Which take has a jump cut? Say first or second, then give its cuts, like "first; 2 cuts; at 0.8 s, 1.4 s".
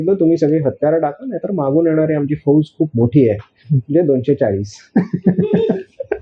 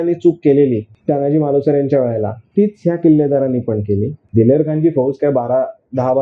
second; 2 cuts; at 0.9 s, 4.2 s